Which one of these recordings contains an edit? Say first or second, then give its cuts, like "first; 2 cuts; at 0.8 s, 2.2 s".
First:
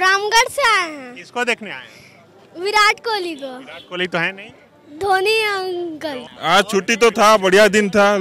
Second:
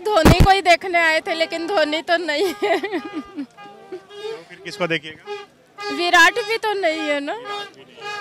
first; 1 cut; at 6.3 s